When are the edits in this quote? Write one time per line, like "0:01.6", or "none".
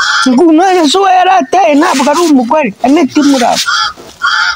none